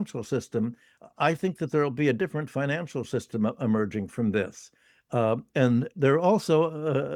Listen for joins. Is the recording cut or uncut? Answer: uncut